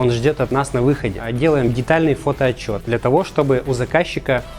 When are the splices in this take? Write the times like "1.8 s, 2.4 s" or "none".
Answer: 1.2 s, 2.7 s